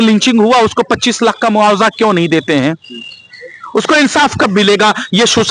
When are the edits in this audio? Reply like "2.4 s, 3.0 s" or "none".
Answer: none